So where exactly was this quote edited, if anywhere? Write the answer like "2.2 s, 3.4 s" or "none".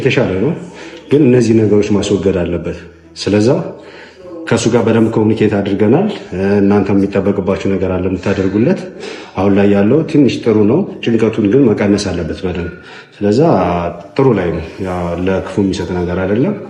none